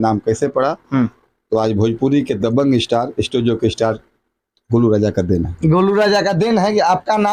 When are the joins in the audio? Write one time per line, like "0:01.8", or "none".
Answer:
none